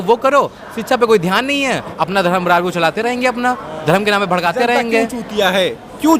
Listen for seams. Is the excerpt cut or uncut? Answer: cut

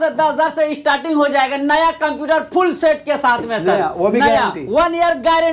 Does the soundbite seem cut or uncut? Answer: uncut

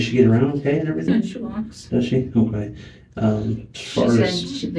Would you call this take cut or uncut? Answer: cut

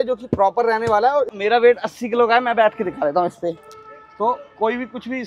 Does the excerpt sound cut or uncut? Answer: cut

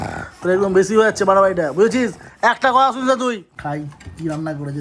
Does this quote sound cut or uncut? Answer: cut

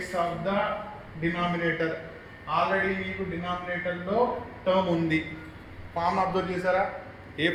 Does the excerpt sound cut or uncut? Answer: uncut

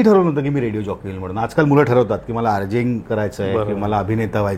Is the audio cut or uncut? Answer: uncut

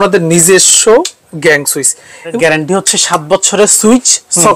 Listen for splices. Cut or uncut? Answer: cut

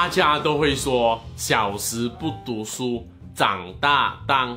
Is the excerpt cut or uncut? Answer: uncut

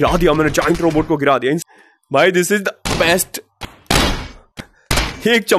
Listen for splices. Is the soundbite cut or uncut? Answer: cut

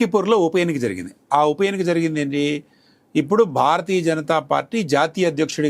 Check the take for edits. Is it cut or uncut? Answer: uncut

